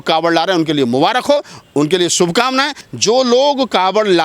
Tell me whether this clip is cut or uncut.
cut